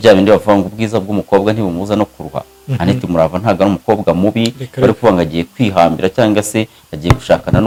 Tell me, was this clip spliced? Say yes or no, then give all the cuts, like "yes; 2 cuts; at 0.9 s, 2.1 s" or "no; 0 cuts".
no; 0 cuts